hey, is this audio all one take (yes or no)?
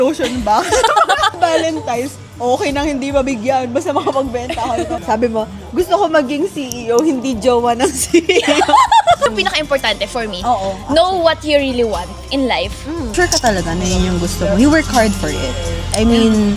no